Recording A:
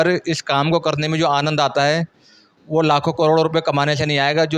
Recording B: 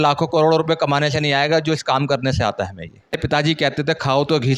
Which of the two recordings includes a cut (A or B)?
B